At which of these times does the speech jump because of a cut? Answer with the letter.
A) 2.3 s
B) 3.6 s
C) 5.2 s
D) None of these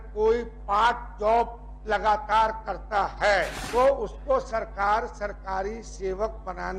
B